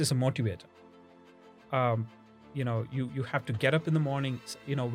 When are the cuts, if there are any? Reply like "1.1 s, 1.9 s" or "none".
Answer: 1.1 s